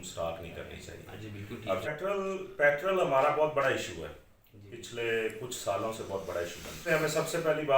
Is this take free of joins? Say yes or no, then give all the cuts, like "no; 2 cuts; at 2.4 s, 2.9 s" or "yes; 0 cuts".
no; 2 cuts; at 1.9 s, 6.8 s